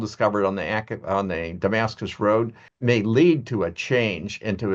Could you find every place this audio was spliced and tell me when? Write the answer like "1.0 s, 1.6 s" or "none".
2.6 s